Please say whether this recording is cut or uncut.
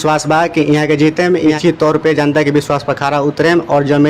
cut